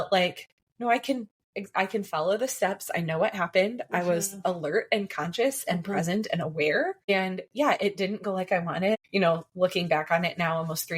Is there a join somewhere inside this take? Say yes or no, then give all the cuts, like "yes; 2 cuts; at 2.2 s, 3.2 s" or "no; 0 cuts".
yes; 2 cuts; at 7.1 s, 8.9 s